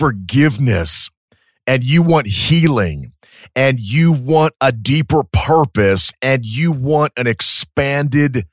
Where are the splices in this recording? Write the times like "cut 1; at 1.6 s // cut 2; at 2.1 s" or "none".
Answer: none